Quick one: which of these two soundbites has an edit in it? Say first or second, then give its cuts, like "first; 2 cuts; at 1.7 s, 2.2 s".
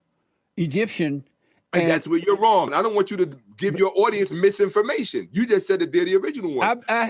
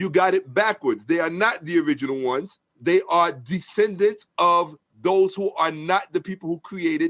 first; 1 cut; at 2.7 s